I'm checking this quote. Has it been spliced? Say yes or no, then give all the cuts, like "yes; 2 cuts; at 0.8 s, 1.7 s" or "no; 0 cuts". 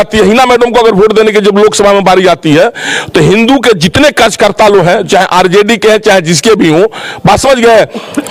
no; 0 cuts